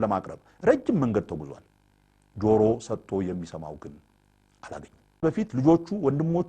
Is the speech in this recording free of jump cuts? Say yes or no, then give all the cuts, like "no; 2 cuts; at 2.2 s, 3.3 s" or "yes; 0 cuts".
no; 1 cut; at 5.2 s